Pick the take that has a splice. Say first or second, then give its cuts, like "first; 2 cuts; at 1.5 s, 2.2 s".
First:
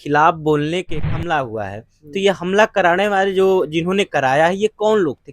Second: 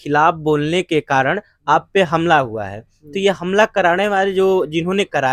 first; 1 cut; at 1.1 s